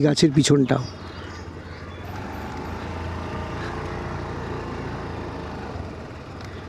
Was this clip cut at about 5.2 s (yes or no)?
no